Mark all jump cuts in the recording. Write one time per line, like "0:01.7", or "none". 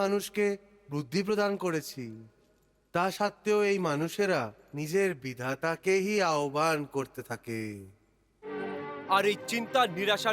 0:08.5